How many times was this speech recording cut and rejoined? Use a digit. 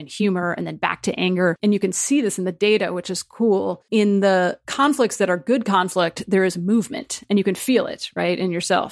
3